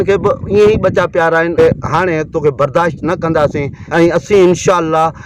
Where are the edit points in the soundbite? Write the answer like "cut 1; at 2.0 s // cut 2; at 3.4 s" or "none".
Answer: cut 1; at 1.6 s // cut 2; at 3.8 s